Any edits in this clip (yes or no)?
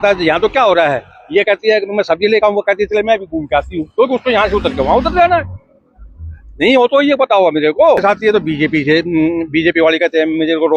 yes